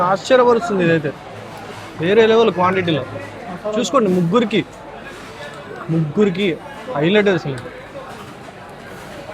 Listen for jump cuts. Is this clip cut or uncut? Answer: uncut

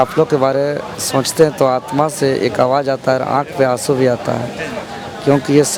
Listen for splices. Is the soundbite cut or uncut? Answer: uncut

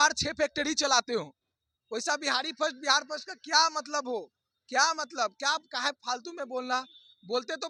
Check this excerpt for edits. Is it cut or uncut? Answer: uncut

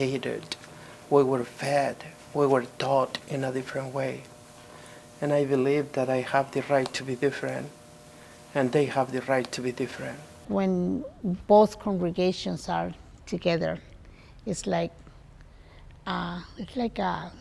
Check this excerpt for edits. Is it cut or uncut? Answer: cut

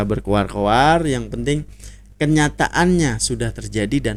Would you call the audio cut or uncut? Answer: uncut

